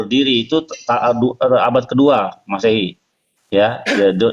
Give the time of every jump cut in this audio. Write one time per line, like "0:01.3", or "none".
none